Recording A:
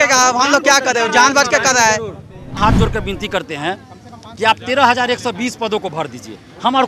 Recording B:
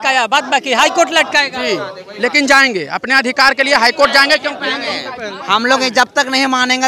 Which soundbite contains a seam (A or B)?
A